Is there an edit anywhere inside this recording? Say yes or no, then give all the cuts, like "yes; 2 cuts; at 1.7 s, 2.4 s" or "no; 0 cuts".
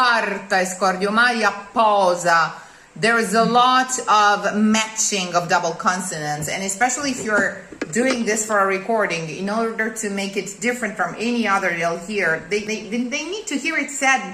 no; 0 cuts